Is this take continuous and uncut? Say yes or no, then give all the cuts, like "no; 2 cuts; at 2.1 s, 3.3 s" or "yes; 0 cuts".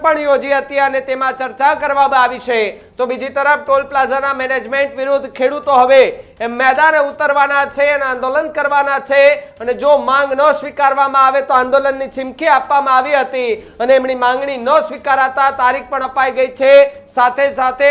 yes; 0 cuts